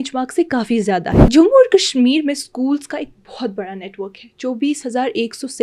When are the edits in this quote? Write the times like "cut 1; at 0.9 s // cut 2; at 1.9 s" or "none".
cut 1; at 1.1 s